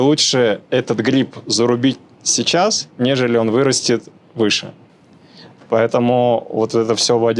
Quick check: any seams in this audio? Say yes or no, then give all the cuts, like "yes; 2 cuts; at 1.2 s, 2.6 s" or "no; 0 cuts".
no; 0 cuts